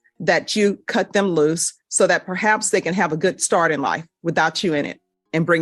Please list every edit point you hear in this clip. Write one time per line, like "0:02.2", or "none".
none